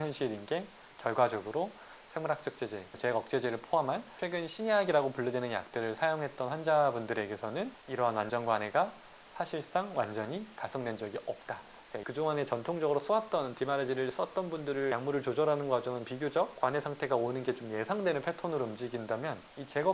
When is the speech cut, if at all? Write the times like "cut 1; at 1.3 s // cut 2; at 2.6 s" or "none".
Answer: cut 1; at 3.0 s // cut 2; at 7.8 s // cut 3; at 12.0 s // cut 4; at 14.9 s // cut 5; at 16.5 s